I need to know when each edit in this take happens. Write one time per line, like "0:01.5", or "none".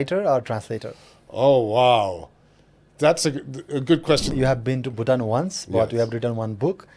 0:04.3